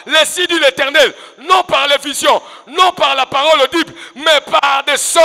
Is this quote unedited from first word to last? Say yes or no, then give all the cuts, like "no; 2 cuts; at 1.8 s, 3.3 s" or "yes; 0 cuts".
yes; 0 cuts